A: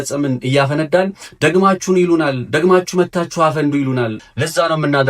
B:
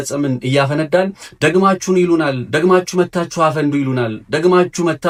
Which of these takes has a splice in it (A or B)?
A